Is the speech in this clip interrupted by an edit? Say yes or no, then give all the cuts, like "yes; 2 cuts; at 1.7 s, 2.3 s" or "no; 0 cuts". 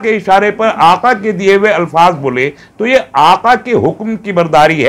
no; 0 cuts